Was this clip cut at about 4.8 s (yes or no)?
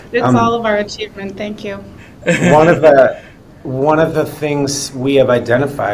no